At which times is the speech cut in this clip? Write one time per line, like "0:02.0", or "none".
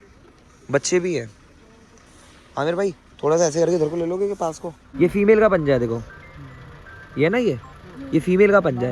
0:04.8